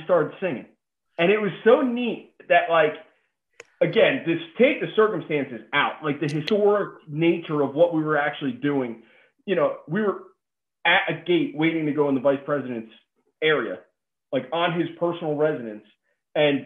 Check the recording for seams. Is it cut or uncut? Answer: cut